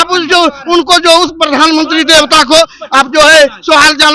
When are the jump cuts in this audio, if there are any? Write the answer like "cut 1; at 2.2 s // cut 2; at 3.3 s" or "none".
none

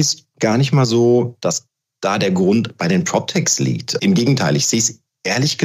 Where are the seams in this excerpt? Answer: cut 1; at 3.9 s

